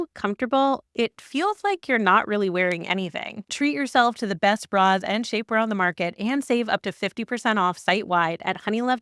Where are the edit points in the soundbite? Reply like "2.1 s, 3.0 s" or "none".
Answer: 3.4 s